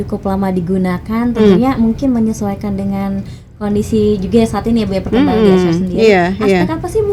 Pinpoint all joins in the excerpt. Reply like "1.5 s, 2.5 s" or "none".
none